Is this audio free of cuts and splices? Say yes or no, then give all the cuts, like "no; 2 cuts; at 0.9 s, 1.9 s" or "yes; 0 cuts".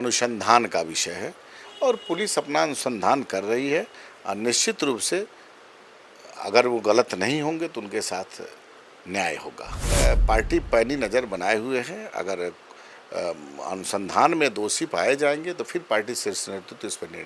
no; 1 cut; at 10.0 s